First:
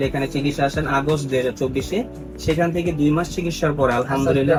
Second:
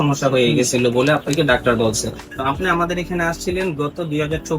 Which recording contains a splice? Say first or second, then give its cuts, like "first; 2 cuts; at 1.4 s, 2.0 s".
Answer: second; 1 cut; at 2.3 s